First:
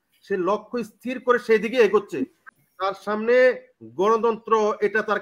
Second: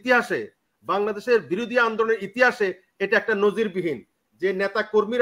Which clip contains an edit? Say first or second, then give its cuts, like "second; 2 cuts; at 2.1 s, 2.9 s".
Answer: first; 1 cut; at 2.4 s